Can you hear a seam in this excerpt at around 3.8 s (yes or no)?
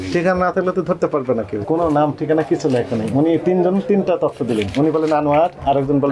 no